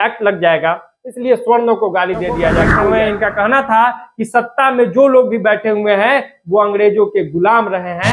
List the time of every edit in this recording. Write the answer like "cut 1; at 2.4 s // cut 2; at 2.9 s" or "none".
cut 1; at 2.8 s